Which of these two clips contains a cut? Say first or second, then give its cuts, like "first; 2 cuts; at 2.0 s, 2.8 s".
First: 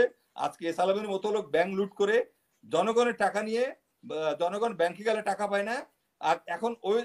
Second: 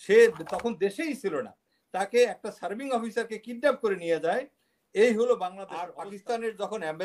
second; 1 cut; at 5.9 s